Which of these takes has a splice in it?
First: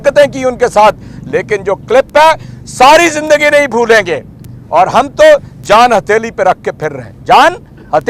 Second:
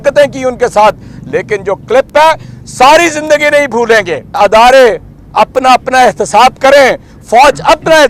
second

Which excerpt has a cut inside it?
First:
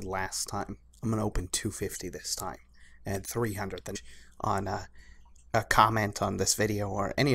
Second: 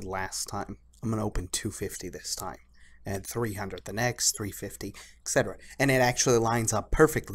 second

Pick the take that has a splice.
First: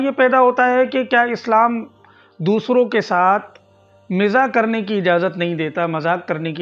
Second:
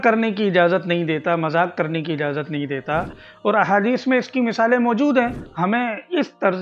second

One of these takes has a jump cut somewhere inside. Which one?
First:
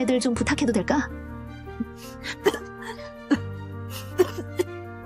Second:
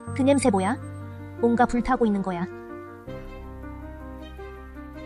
second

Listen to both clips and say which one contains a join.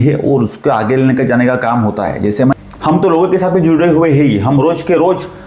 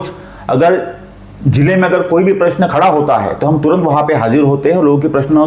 first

